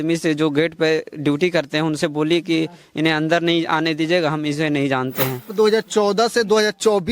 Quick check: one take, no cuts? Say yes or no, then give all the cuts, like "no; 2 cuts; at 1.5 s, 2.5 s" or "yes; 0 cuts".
no; 1 cut; at 5.5 s